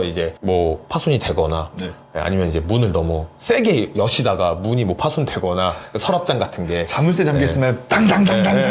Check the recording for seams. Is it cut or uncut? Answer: uncut